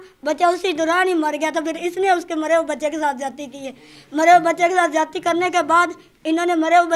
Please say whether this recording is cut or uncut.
uncut